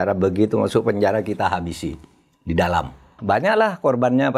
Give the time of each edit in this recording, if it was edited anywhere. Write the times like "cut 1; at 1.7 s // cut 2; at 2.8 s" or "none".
cut 1; at 3.2 s

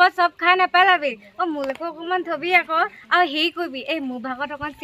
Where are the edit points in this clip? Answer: none

